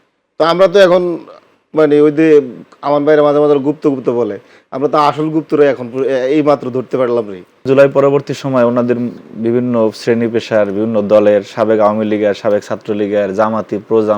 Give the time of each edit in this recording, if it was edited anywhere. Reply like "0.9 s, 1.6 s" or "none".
7.6 s